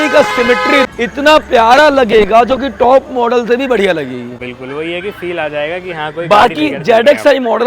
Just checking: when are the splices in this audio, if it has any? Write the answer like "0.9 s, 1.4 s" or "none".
none